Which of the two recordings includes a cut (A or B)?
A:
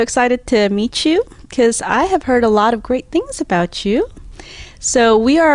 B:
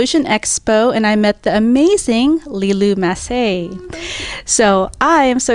A